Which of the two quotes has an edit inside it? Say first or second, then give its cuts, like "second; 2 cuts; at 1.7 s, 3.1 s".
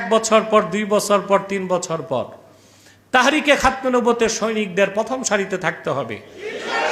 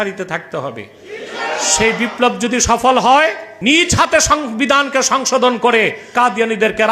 second; 2 cuts; at 3.5 s, 6.1 s